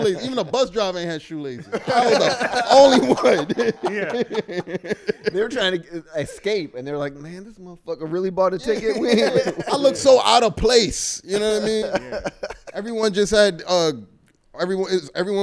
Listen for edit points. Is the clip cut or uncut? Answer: uncut